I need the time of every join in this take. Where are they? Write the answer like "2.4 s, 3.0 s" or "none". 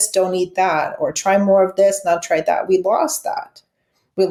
none